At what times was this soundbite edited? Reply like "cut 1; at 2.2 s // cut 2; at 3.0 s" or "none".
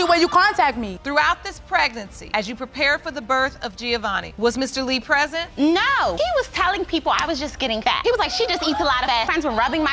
cut 1; at 0.9 s